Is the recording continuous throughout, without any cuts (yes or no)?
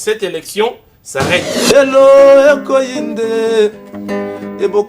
no